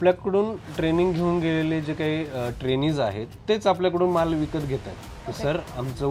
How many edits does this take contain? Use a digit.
1